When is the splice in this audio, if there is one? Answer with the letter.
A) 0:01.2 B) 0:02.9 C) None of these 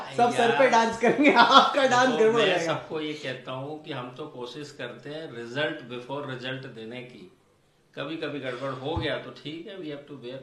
C